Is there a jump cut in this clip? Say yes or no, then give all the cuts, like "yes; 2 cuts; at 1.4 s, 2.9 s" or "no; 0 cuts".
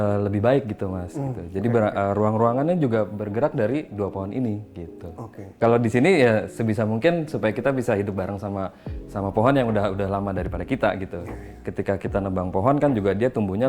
yes; 1 cut; at 5.6 s